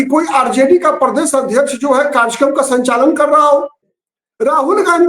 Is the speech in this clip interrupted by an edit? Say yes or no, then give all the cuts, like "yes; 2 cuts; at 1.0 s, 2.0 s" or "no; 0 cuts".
yes; 1 cut; at 3.9 s